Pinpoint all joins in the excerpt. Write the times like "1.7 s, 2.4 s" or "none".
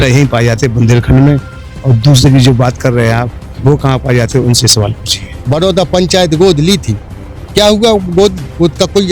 5.3 s